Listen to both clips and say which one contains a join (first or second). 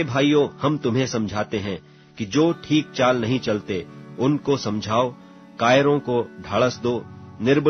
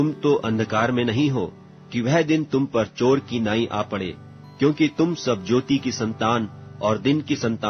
second